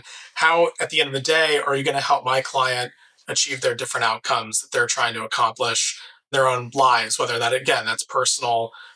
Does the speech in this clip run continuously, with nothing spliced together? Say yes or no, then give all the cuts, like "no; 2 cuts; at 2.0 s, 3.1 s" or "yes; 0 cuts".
no; 1 cut; at 6.3 s